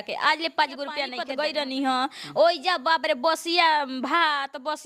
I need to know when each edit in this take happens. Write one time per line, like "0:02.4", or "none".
0:01.1